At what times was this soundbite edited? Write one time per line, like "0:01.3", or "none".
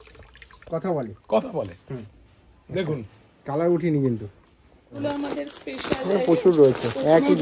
0:05.0